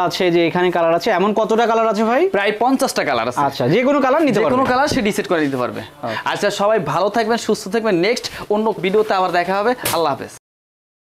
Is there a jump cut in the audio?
no; 0 cuts

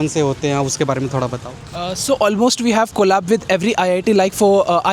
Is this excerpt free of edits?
yes; 0 cuts

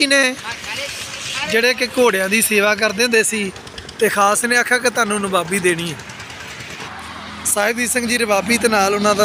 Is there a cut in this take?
yes; 1 cut; at 6.7 s

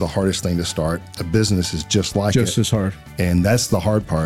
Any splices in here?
no; 0 cuts

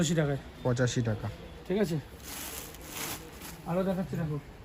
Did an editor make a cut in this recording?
no; 0 cuts

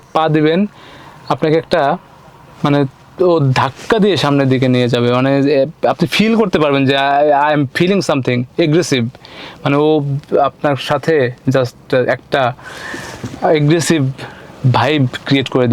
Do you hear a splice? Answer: no; 0 cuts

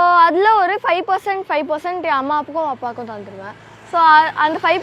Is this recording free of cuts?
yes; 0 cuts

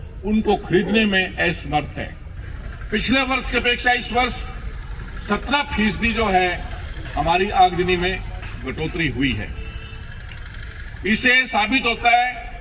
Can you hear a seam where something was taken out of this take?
yes; 1 cut; at 2.3 s

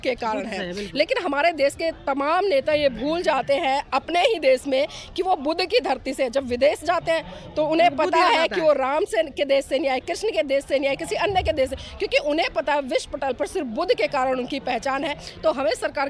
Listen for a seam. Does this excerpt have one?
no; 0 cuts

